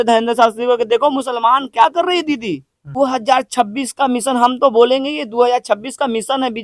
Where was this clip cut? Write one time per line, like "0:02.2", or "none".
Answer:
0:02.8